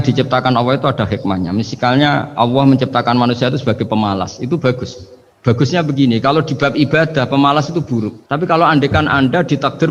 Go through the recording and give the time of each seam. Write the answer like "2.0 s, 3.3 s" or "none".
none